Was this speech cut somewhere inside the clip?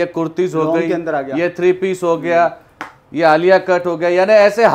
no; 0 cuts

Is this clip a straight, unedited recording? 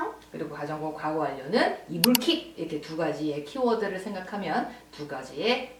yes; 0 cuts

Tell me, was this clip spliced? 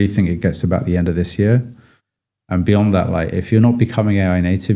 no; 0 cuts

